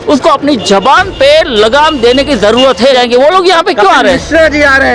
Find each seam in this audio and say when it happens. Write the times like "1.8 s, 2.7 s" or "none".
3.0 s